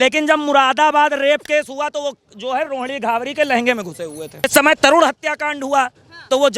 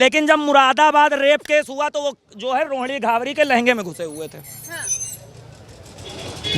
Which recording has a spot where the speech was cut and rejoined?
first; 1 cut; at 4.4 s

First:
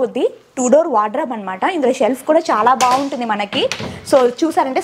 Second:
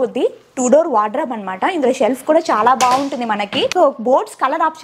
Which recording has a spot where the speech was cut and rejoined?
second; 1 cut; at 3.7 s

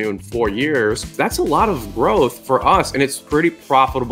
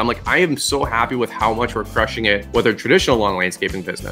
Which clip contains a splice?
first; 2 cuts; at 1.1 s, 3.0 s

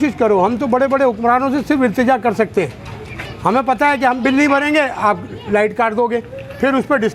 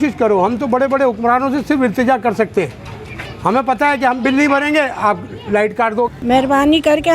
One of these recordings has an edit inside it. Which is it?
second; 1 cut; at 6.1 s

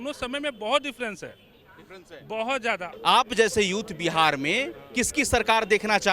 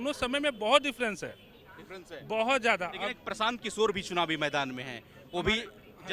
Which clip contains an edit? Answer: first; 1 cut; at 2.9 s

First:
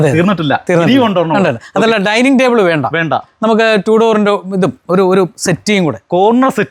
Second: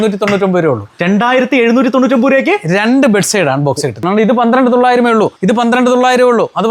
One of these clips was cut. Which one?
second; 2 cuts; at 4.0 s, 5.4 s

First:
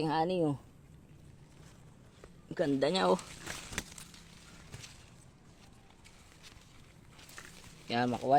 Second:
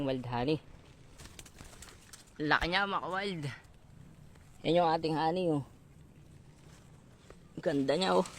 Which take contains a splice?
second; 1 cut; at 1.2 s

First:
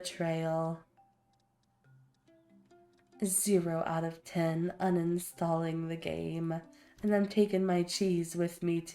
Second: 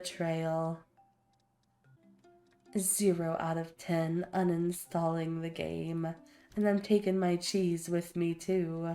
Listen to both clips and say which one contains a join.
second; 1 cut; at 2.0 s

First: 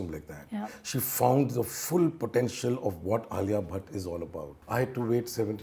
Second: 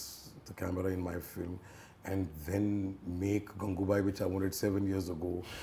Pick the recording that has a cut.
first; 1 cut; at 4.6 s

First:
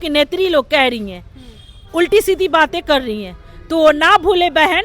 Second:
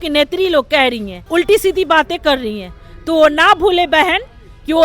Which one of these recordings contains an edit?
second; 1 cut; at 1.1 s

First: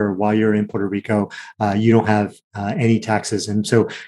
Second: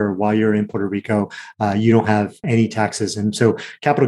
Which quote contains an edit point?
second; 1 cut; at 2.4 s

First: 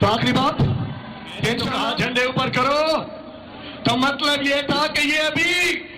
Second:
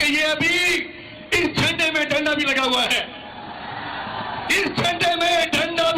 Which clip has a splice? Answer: first; 1 cut; at 1.7 s

